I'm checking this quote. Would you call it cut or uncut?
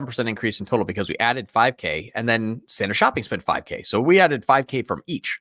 uncut